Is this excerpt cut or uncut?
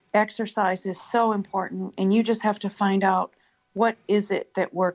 uncut